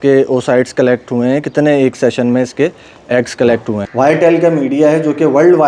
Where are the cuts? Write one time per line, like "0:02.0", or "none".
0:03.8